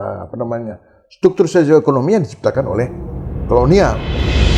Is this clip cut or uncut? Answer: uncut